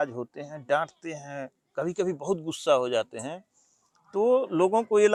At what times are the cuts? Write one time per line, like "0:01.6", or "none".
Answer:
none